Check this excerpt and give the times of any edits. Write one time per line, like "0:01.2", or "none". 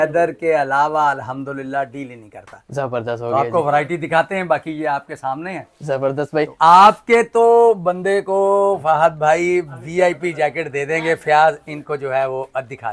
none